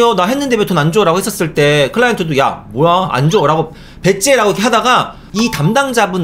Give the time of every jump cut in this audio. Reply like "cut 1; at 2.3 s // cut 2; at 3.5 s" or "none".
cut 1; at 5.2 s